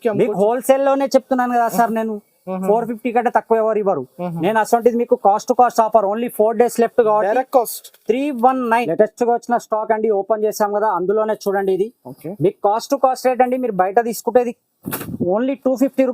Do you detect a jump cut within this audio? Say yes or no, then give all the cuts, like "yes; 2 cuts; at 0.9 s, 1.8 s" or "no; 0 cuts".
yes; 1 cut; at 8.8 s